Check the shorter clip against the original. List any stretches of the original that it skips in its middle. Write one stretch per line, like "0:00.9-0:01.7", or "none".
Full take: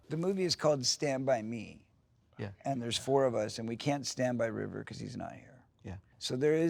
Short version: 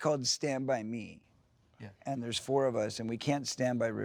none

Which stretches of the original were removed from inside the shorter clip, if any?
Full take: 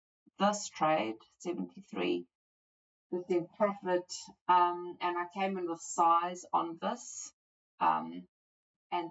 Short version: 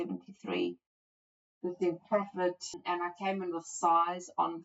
0:04.2-0:04.9

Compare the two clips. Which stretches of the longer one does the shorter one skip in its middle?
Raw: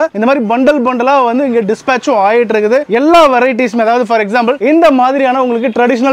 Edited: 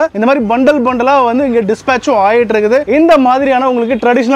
0:02.9-0:04.6

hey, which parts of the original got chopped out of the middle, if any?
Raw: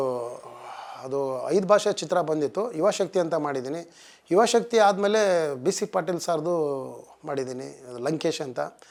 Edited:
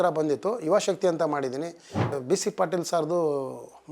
0:04.2-0:05.5

